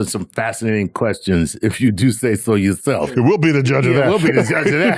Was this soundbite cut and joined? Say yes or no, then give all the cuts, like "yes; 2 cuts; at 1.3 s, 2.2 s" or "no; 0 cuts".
yes; 1 cut; at 3.1 s